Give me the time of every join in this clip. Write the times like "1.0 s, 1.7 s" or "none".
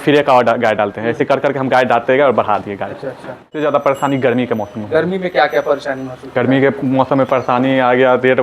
3.5 s